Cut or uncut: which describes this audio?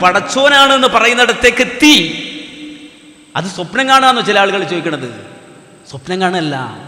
uncut